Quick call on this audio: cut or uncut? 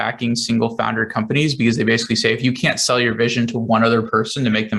uncut